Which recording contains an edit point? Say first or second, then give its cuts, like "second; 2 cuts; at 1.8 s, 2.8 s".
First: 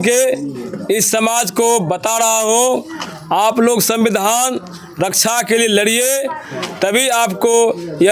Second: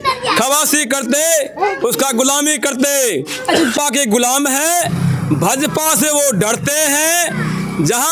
second; 1 cut; at 3.7 s